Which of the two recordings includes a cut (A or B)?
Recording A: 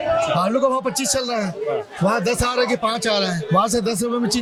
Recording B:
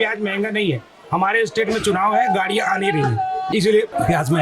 B